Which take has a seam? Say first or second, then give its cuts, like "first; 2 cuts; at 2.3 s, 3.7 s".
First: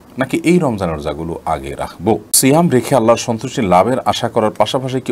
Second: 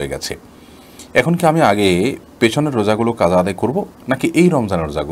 first; 1 cut; at 2.3 s